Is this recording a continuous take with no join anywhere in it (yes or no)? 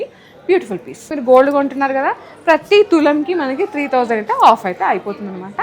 no